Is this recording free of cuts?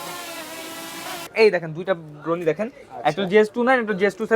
no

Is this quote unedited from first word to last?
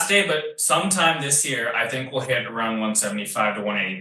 yes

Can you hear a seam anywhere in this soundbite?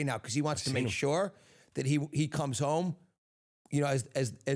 no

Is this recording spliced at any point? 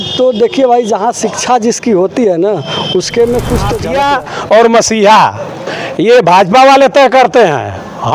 yes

